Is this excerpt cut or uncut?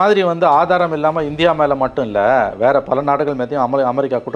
uncut